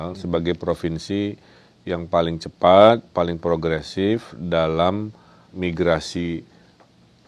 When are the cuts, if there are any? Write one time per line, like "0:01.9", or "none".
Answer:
0:05.5